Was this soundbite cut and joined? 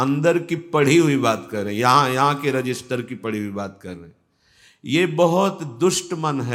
no; 0 cuts

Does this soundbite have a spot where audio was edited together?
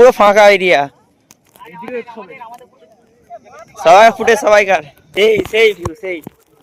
yes; 1 cut; at 5.5 s

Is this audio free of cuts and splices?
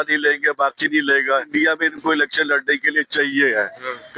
no; 1 cut; at 1.5 s

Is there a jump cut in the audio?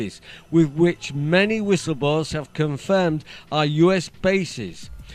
no; 0 cuts

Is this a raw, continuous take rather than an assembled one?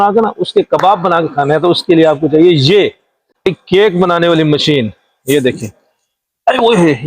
no; 1 cut; at 3.3 s

